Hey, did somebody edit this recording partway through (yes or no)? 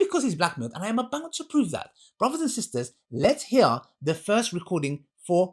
no